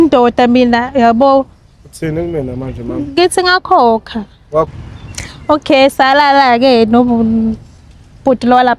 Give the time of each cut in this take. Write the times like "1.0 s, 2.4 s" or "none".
4.7 s

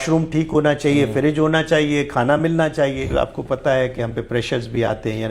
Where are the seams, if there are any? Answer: 3.1 s

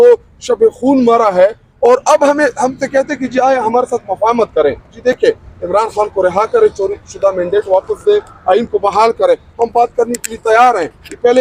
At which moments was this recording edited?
none

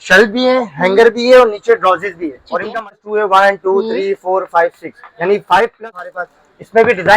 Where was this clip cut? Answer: 2.7 s, 6.0 s

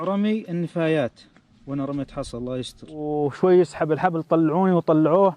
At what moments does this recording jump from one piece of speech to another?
3.1 s

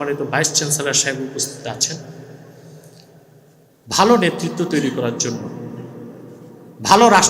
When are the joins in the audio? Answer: none

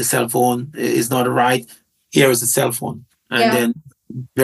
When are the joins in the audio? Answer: none

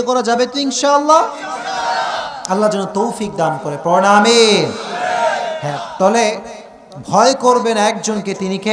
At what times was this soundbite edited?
5.7 s

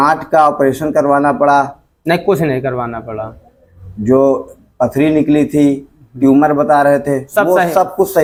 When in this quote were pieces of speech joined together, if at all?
none

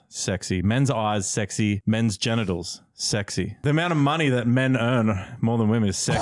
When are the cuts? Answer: 1.8 s, 3.6 s

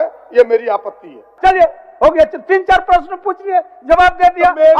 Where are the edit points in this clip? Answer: 1.3 s

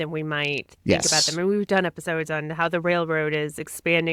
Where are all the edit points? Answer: none

